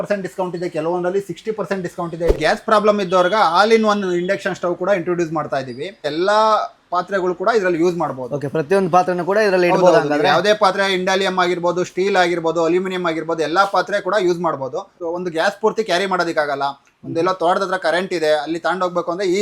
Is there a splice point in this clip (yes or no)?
yes